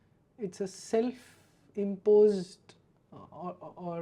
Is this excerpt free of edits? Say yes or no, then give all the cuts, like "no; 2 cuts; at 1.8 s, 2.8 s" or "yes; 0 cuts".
yes; 0 cuts